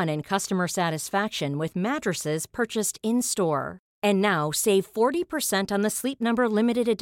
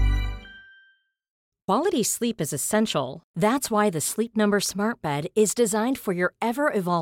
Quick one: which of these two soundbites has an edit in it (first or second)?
second